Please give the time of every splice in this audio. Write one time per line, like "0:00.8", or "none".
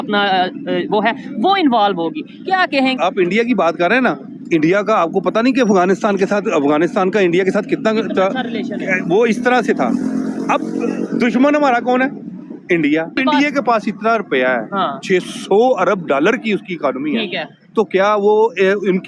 0:13.2